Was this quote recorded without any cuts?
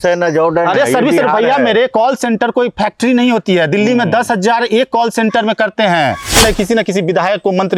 no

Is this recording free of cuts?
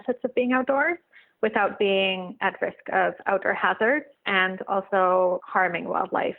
no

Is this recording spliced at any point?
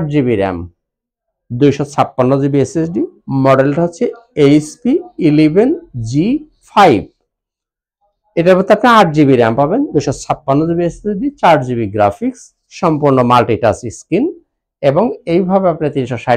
no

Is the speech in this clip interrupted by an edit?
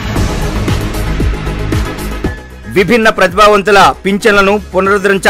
yes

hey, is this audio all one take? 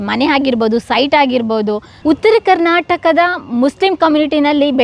no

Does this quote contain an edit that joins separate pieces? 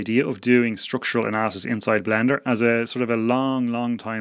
no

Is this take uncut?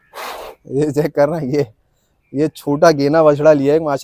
yes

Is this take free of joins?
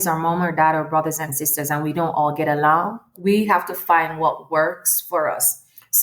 no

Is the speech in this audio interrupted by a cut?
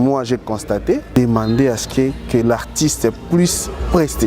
yes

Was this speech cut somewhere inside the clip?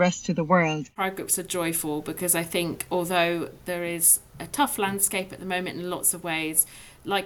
yes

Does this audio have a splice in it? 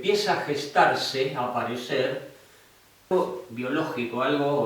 yes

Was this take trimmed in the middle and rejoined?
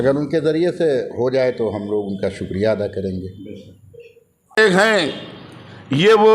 yes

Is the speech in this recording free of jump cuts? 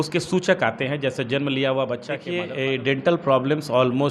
no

